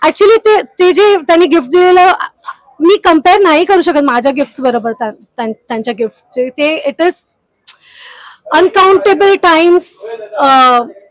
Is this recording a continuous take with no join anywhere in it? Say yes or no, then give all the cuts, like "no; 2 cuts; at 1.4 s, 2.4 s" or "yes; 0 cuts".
yes; 0 cuts